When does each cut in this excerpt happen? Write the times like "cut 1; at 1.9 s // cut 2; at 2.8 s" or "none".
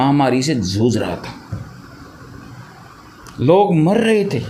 none